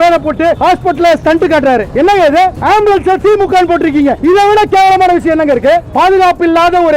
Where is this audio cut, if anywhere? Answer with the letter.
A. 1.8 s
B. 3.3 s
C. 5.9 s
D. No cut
C